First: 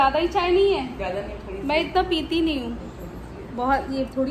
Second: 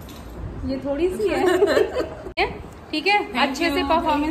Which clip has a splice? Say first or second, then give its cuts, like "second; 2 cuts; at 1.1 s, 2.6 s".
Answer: second; 1 cut; at 2.2 s